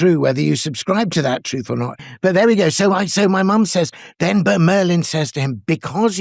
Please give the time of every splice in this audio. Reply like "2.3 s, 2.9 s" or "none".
2.0 s

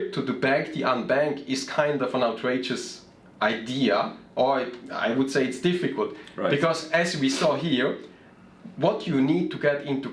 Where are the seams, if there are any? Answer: none

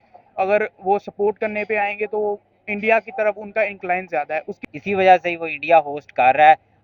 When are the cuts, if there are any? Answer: 4.6 s

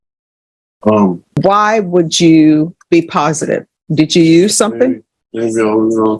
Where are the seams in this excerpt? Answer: 1.4 s, 2.8 s, 3.8 s

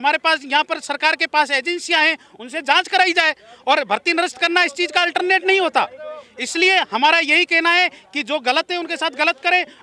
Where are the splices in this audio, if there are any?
none

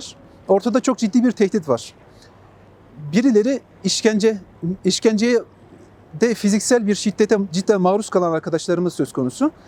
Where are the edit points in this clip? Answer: none

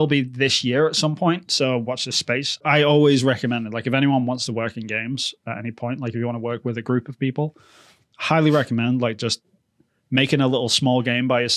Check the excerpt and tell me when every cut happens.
2.6 s

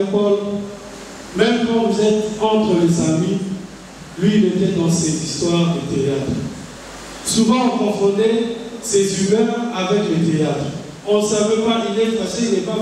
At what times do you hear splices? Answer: 6.7 s

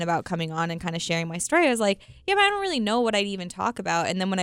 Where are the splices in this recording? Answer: none

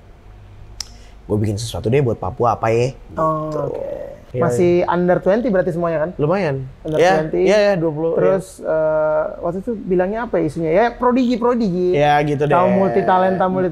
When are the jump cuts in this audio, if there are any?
4.2 s

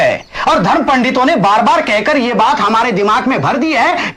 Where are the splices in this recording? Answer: none

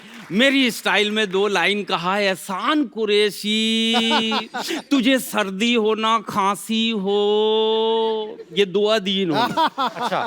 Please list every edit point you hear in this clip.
none

